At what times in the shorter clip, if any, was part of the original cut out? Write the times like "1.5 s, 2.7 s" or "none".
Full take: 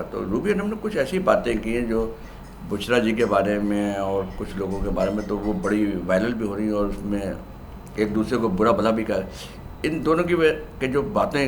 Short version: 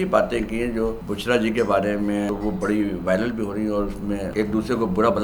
1.1 s, 2.3 s, 4.3 s